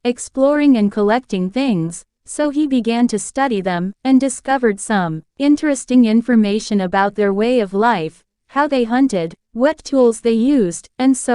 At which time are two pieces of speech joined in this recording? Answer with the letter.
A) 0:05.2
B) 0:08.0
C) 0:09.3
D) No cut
A